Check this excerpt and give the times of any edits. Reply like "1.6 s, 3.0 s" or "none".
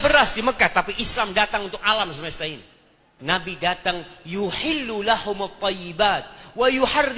3.1 s